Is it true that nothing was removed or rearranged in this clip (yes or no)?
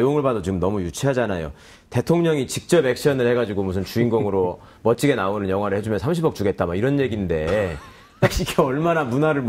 no